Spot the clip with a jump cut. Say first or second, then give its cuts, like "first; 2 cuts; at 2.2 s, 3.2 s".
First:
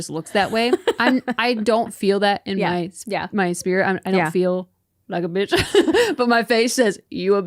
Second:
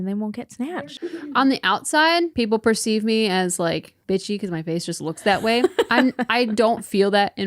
second; 3 cuts; at 0.7 s, 2.3 s, 3.9 s